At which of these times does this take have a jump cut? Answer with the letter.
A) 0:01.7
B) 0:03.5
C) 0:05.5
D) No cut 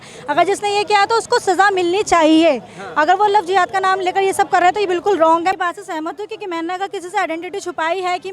C